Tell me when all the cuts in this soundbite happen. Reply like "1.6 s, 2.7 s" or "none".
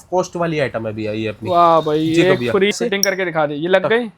2.7 s